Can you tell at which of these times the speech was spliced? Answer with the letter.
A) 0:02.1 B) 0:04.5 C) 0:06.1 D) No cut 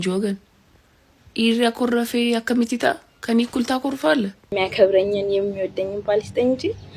B